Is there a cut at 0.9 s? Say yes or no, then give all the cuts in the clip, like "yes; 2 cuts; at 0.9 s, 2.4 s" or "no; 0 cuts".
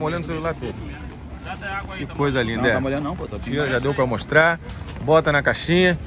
no; 0 cuts